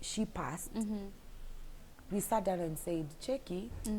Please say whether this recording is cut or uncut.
uncut